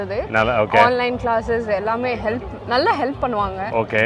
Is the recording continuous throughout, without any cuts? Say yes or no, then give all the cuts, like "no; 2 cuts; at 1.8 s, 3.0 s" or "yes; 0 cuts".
yes; 0 cuts